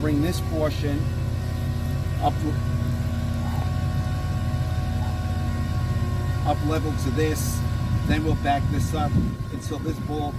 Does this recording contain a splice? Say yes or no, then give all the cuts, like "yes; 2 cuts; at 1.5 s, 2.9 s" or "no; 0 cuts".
no; 0 cuts